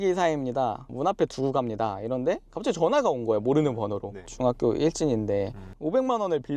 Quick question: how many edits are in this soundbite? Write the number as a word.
two